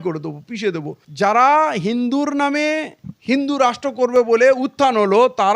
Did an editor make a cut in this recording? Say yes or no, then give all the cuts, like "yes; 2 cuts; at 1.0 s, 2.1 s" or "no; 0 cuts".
yes; 1 cut; at 1.0 s